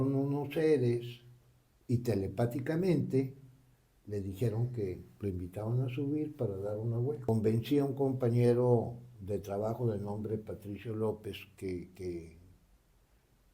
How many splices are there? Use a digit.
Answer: 1